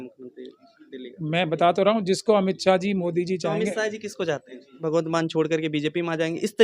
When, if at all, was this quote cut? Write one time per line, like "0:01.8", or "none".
0:04.8